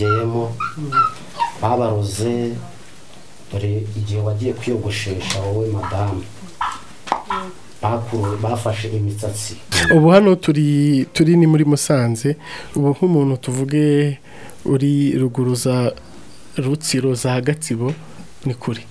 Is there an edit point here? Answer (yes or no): yes